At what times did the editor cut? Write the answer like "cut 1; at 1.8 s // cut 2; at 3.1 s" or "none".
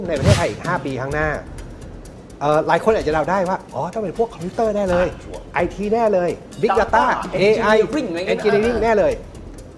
none